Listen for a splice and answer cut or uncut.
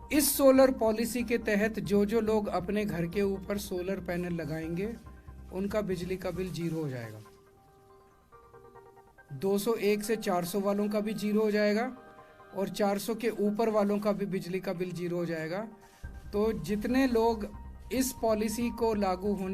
cut